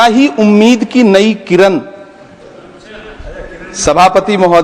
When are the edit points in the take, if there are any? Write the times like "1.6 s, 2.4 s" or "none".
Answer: none